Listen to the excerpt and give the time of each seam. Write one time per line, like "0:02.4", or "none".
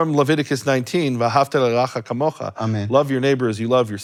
none